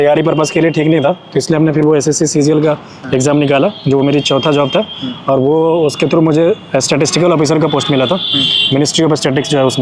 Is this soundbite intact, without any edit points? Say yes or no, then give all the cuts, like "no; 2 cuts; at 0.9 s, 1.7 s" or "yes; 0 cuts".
yes; 0 cuts